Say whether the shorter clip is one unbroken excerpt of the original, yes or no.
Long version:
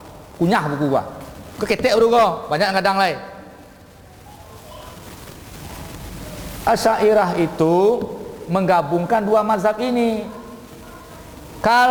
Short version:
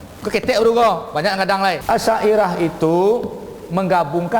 no